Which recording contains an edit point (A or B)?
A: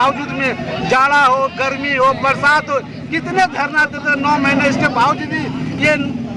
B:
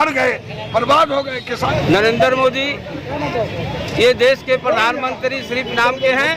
B